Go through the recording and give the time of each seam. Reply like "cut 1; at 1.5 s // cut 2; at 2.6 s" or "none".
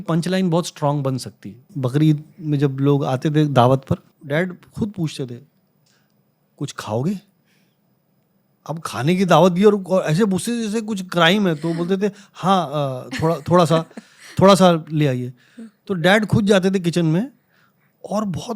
cut 1; at 1.7 s // cut 2; at 4.1 s